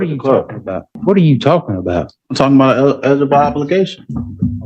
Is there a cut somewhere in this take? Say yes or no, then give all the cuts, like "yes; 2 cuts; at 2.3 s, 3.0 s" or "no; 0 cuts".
yes; 1 cut; at 0.9 s